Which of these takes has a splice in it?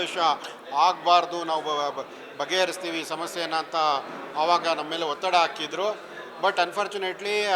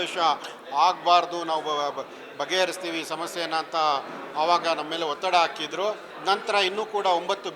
second; 1 cut; at 6.1 s

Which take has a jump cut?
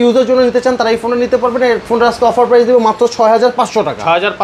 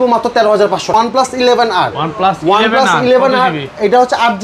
second; 1 cut; at 0.9 s

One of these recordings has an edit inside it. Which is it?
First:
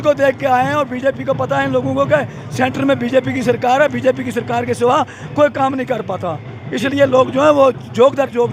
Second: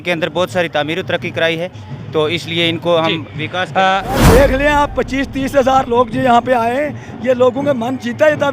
second; 1 cut; at 4.2 s

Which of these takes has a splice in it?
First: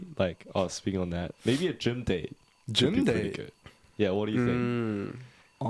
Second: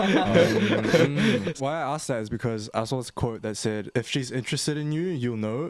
second; 2 cuts; at 1.5 s, 3.9 s

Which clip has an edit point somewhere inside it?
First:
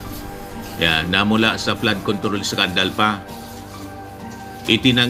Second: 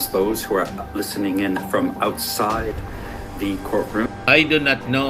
second; 1 cut; at 4.1 s

